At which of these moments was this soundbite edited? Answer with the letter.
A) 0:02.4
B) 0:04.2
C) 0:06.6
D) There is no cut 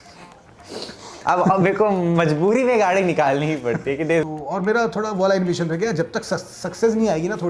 B